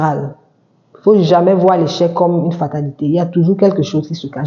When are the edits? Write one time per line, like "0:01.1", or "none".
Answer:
none